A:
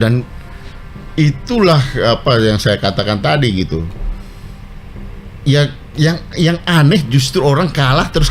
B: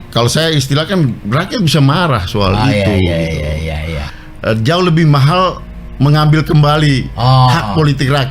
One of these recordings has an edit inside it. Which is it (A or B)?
B